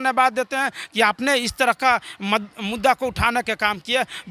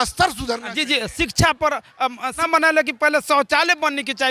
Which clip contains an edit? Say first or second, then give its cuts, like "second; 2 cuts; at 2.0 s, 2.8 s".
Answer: second; 1 cut; at 2.4 s